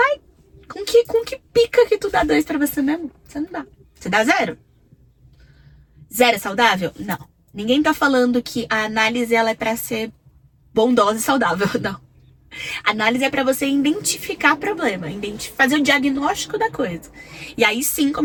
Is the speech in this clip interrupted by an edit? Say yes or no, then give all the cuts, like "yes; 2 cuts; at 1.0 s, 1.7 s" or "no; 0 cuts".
no; 0 cuts